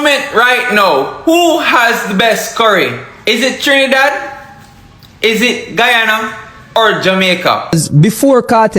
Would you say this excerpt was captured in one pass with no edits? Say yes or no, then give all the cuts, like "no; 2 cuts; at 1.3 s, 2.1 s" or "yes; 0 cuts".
no; 1 cut; at 7.7 s